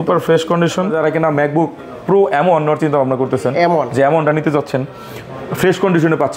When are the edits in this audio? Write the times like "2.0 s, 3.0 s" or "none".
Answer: 0.9 s

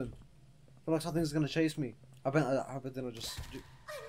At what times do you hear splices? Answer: 2.0 s

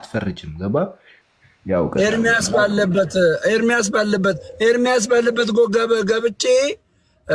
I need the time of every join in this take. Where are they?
1.2 s

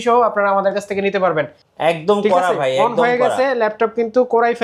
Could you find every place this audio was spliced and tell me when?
1.6 s

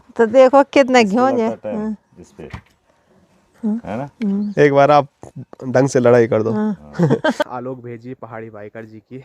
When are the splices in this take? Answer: 7.4 s

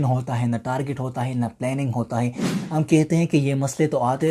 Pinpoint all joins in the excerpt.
2.5 s

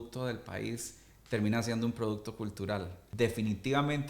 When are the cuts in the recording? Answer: 3.0 s

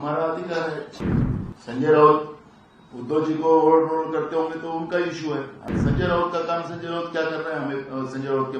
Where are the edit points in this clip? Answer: 1.0 s, 5.6 s

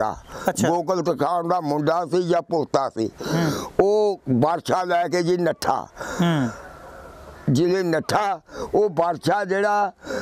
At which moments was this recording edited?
none

